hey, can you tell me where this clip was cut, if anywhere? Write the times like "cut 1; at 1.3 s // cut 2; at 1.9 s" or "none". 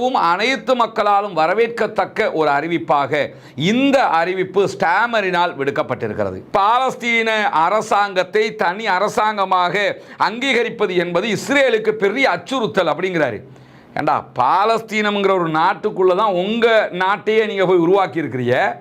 cut 1; at 6.4 s

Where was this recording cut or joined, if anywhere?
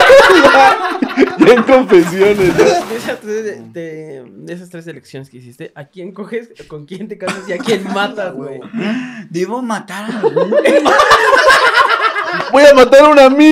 cut 1; at 2.9 s

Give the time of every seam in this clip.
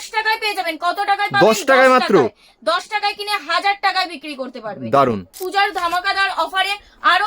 cut 1; at 5.4 s

